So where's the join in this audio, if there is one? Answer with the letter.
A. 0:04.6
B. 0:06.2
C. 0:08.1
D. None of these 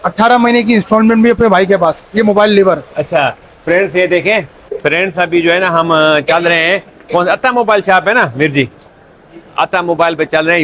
A